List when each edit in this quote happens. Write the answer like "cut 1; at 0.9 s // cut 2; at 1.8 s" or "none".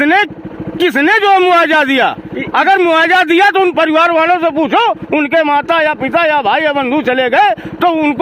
none